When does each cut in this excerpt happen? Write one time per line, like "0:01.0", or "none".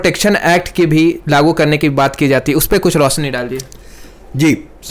none